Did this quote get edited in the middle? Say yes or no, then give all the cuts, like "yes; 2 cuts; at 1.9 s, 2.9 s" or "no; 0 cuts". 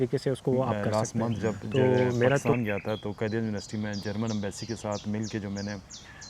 yes; 1 cut; at 2.5 s